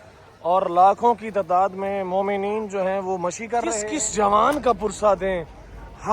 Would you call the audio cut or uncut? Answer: cut